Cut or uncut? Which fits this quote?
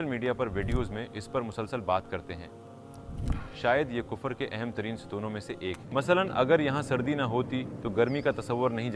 cut